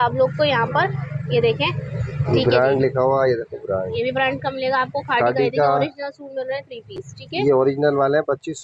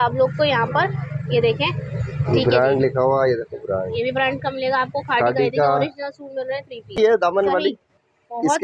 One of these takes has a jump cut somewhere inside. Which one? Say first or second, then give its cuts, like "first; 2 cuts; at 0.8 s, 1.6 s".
second; 1 cut; at 6.9 s